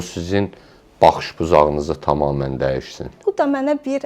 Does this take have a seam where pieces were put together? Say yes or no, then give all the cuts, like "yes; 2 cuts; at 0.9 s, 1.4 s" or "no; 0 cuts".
yes; 1 cut; at 3.1 s